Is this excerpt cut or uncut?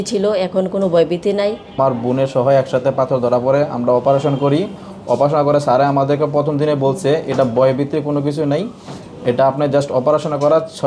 cut